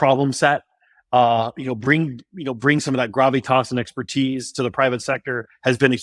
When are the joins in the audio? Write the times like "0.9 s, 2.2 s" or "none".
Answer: none